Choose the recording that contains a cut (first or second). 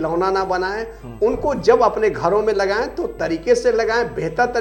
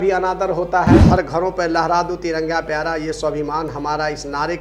second